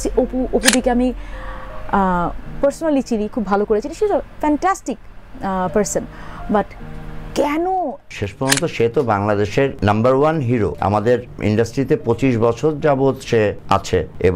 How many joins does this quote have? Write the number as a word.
one